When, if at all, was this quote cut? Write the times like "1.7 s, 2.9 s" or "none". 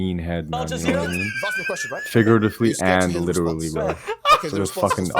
none